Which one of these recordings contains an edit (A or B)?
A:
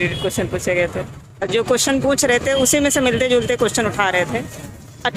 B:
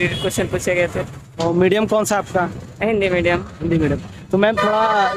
A